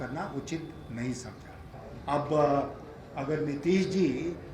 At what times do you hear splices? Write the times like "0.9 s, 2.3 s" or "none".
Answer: 1.7 s